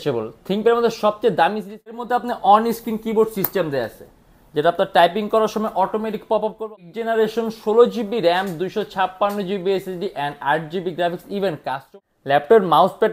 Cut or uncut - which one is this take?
cut